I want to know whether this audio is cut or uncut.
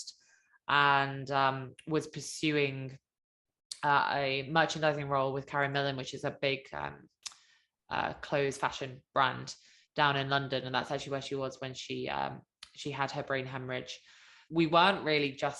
cut